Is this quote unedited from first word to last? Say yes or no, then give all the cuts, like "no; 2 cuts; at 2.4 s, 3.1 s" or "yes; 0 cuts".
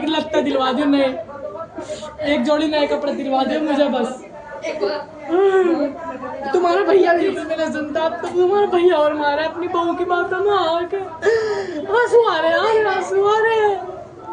yes; 0 cuts